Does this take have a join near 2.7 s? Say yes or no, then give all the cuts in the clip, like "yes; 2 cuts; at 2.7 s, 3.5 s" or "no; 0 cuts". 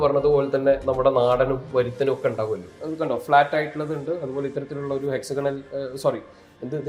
yes; 1 cut; at 2.7 s